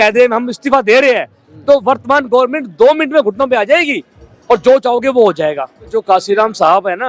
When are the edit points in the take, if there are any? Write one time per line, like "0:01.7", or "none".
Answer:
0:06.0

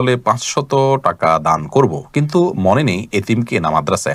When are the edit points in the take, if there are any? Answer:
none

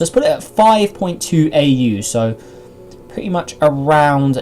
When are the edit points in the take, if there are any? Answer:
0:01.0

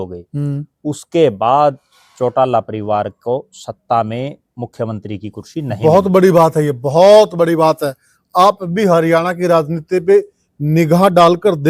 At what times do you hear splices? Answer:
none

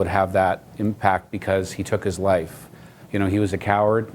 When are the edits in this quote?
none

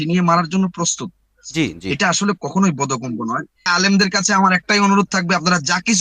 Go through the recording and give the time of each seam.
0:03.7

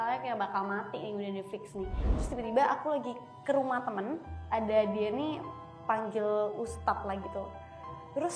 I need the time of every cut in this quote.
0:02.0

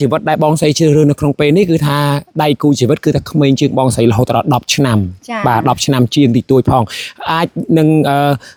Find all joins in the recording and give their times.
none

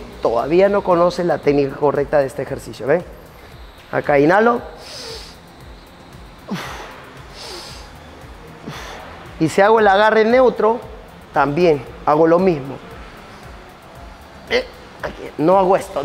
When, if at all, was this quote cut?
none

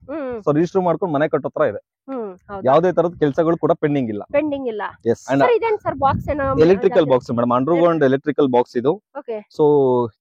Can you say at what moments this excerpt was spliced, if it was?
0:05.2

